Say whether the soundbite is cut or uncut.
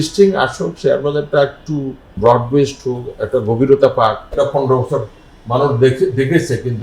cut